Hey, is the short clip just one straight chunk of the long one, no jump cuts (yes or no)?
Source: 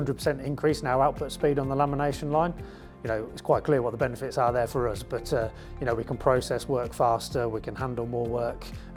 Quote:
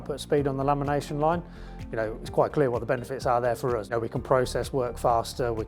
no